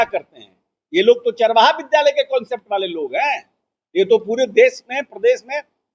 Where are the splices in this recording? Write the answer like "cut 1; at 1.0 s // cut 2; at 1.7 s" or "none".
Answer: none